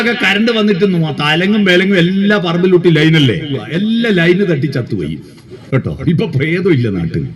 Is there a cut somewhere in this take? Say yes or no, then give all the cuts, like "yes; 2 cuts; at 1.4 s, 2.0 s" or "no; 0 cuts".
yes; 1 cut; at 3.6 s